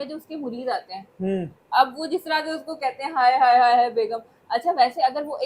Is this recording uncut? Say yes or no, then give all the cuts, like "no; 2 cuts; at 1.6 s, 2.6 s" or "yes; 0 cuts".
yes; 0 cuts